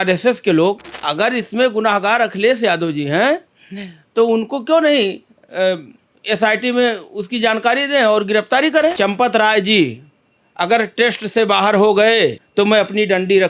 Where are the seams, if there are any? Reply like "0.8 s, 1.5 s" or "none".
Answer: 0.9 s, 8.9 s, 12.4 s